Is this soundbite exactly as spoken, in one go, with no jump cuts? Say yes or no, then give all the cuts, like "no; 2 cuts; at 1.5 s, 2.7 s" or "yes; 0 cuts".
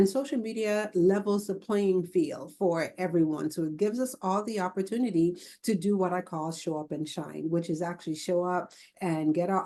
yes; 0 cuts